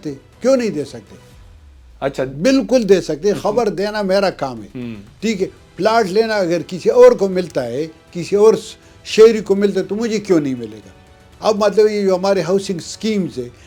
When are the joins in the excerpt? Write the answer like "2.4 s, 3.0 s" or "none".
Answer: none